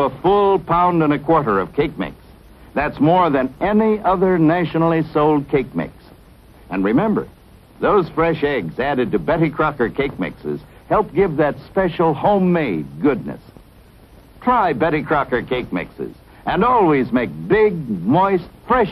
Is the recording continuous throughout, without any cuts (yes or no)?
no